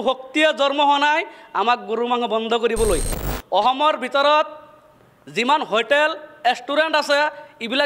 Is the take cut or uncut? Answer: cut